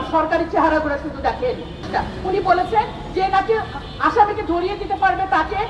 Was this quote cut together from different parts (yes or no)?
yes